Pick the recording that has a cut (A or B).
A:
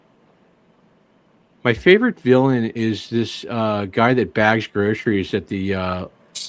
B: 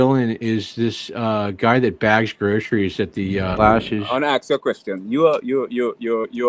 B